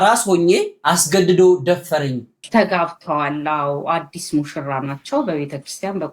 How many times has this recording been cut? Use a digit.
1